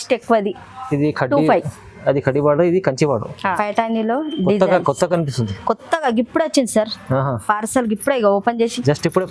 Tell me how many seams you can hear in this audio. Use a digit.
1